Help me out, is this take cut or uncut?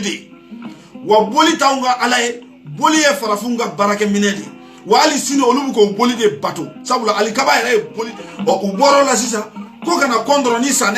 cut